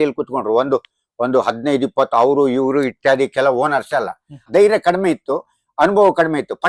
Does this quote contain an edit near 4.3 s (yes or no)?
yes